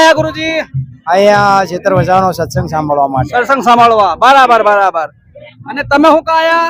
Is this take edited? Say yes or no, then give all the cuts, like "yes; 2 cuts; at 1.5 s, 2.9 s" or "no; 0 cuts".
no; 0 cuts